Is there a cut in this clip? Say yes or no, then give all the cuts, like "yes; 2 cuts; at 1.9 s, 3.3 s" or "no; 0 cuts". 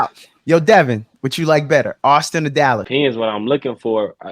yes; 1 cut; at 2.8 s